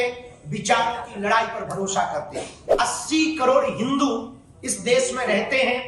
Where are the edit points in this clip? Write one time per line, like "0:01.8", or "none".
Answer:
0:02.6